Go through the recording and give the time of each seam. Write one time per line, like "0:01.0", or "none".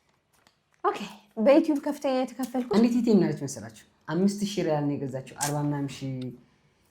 0:02.7